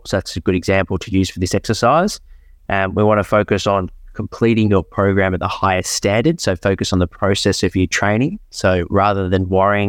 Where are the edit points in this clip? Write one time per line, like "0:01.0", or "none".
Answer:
none